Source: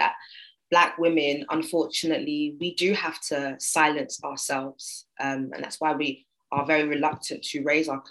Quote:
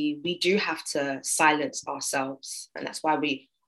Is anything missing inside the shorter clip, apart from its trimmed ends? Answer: yes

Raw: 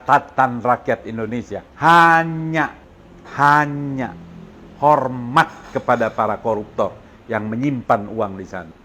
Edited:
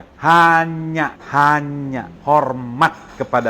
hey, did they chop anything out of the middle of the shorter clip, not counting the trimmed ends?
yes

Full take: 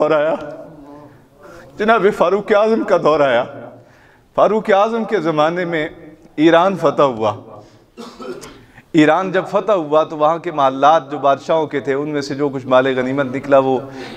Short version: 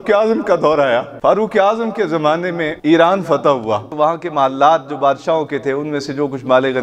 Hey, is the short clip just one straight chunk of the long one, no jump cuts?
no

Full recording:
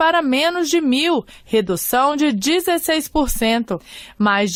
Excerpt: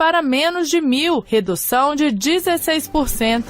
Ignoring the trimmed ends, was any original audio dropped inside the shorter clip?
yes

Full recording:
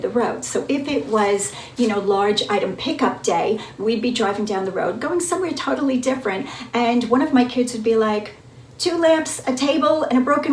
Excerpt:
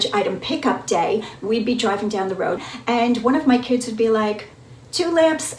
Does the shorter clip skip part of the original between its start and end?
yes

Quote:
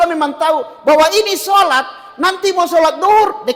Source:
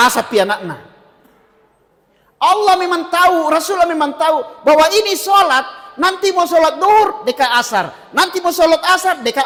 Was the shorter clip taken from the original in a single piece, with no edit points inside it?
yes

